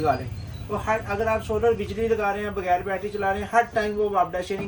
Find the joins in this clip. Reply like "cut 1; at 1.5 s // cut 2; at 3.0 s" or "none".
none